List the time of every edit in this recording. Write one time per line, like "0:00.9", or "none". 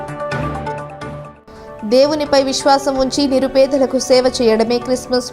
0:01.1